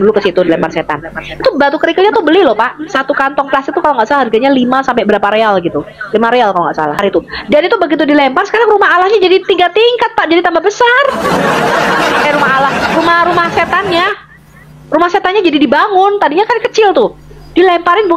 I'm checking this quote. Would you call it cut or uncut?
cut